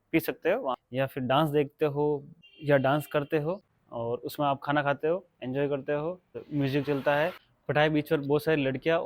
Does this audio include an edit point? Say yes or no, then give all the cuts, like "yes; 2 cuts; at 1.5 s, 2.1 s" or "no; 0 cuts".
yes; 3 cuts; at 0.8 s, 3.7 s, 7.5 s